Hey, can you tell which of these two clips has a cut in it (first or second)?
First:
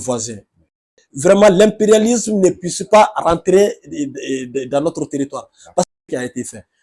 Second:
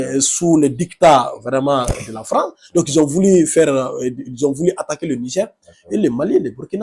first